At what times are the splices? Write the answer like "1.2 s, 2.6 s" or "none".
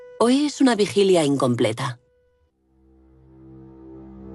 0.9 s